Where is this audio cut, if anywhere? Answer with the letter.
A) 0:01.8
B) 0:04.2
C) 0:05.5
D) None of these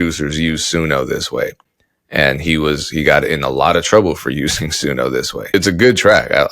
C